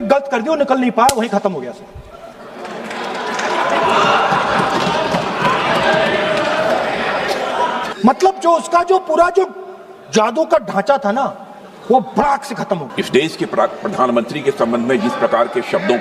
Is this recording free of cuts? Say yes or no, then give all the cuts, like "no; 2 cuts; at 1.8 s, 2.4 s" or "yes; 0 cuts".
no; 2 cuts; at 7.9 s, 12.9 s